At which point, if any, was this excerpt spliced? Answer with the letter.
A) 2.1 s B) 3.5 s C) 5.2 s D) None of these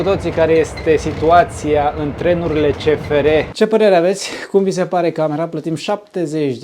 B